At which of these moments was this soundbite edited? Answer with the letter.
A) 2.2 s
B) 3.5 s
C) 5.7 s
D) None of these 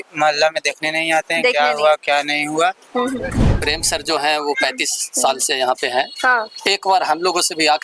B